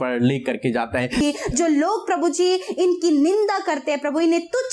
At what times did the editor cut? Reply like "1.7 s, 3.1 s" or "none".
1.2 s